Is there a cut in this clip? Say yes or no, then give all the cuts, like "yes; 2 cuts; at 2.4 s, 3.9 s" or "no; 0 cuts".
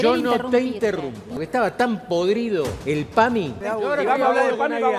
yes; 3 cuts; at 1.3 s, 2.8 s, 3.6 s